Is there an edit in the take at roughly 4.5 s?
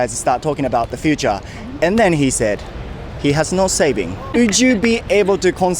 no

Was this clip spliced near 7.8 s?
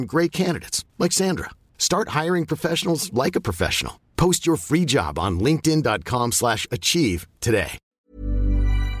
yes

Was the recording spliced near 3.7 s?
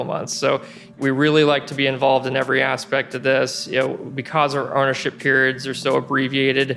no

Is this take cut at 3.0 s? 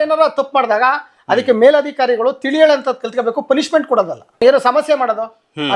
no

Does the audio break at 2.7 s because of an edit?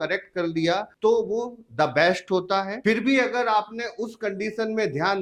no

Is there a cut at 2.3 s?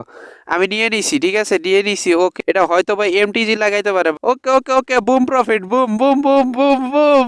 yes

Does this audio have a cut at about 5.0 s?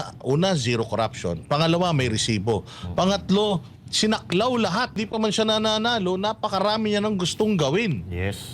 yes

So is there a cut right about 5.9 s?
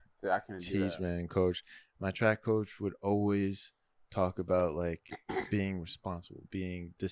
no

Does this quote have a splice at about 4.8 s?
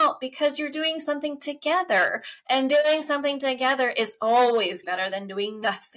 yes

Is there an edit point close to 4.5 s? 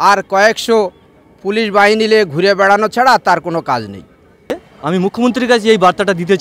yes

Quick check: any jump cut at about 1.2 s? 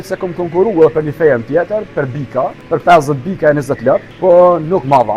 no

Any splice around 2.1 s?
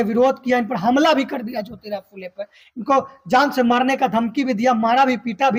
no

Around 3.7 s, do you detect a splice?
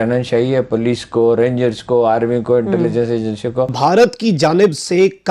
yes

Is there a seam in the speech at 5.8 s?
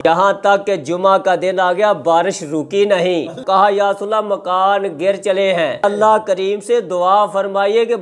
yes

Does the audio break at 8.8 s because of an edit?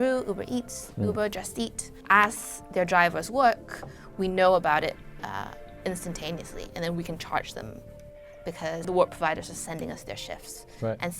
yes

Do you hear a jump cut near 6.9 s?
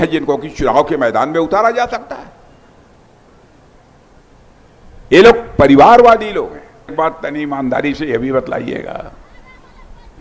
yes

